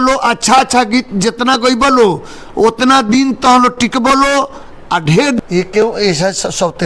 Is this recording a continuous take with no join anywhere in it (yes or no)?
no